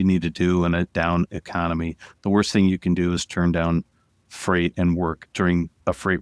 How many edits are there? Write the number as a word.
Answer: two